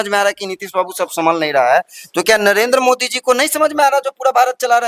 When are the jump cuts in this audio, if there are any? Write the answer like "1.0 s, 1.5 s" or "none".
none